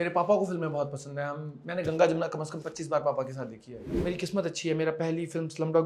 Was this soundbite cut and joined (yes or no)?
yes